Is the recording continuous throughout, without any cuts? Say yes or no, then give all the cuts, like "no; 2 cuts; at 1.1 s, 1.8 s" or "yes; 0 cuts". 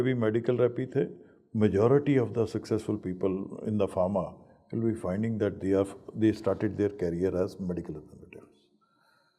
yes; 0 cuts